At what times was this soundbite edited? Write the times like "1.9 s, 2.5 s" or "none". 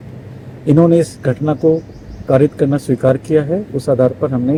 none